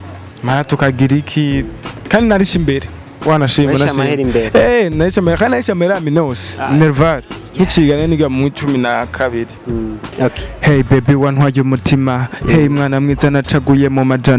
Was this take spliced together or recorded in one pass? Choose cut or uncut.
cut